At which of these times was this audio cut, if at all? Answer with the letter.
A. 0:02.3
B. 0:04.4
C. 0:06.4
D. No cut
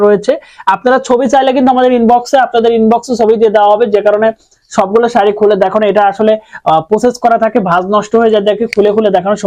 D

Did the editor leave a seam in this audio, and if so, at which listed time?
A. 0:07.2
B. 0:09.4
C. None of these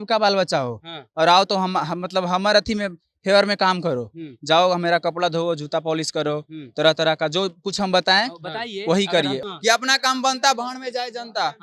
B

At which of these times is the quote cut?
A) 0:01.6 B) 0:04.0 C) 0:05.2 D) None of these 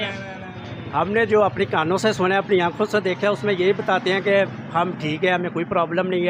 D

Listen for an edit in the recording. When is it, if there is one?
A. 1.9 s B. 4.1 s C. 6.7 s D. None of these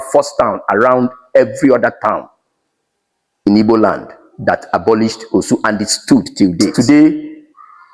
C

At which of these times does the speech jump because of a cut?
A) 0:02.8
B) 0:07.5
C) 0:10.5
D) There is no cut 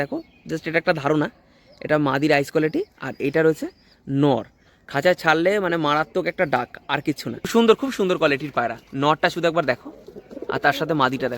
B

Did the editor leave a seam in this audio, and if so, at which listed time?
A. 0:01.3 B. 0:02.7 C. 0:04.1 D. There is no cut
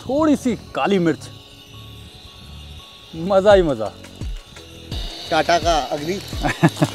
D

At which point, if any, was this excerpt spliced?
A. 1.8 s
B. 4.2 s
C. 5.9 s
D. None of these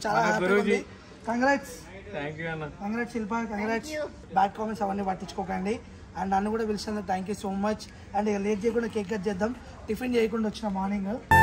B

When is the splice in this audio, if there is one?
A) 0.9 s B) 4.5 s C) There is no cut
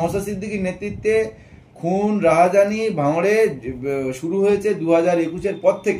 C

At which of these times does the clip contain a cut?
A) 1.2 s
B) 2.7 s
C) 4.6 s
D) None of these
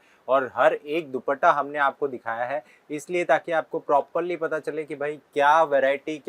D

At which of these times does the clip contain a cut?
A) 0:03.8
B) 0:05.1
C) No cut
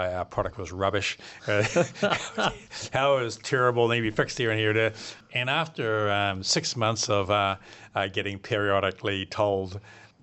B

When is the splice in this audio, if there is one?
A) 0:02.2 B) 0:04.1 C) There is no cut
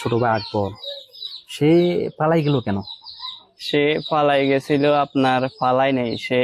C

